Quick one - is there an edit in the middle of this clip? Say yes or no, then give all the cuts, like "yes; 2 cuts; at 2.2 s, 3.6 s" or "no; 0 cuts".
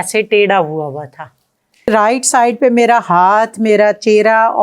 yes; 1 cut; at 1.9 s